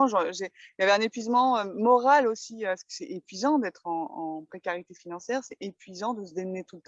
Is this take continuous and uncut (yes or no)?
yes